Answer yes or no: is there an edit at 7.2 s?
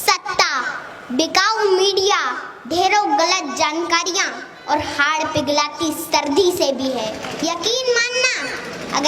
yes